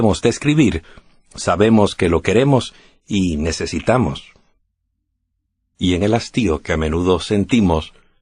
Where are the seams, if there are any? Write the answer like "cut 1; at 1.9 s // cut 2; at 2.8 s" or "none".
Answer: none